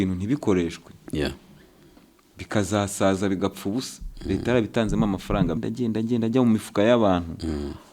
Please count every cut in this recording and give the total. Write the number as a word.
one